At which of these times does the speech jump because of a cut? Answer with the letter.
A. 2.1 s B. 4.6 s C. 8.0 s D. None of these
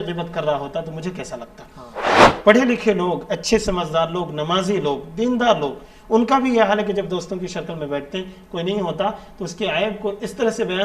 A